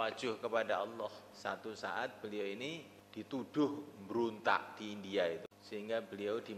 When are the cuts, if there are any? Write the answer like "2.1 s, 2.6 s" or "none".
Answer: 1.3 s, 3.0 s, 5.5 s